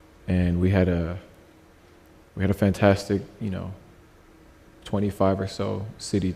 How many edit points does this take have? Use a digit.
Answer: 0